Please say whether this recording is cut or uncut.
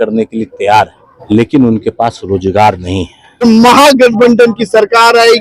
cut